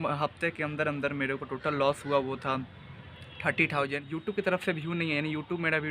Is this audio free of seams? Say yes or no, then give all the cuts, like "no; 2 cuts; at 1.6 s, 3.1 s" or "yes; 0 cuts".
no; 1 cut; at 4.1 s